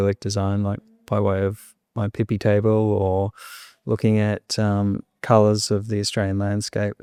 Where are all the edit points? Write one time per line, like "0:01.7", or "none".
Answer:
none